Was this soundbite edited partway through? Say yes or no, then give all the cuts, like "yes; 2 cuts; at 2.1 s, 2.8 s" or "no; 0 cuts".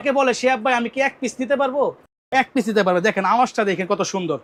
no; 0 cuts